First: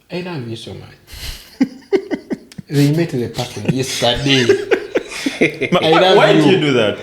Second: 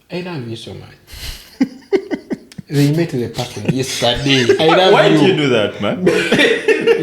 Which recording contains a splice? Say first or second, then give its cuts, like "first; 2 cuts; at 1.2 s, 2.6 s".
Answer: second; 1 cut; at 4.6 s